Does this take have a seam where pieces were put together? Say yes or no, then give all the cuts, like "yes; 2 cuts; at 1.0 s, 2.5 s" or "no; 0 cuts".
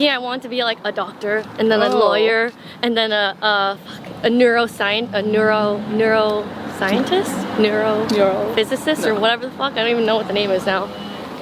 no; 0 cuts